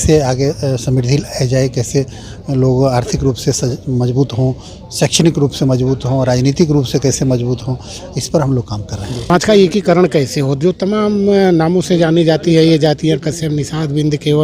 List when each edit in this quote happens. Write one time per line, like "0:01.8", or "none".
0:09.3